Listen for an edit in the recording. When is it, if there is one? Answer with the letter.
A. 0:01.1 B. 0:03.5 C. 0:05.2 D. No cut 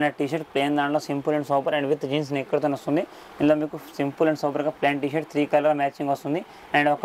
D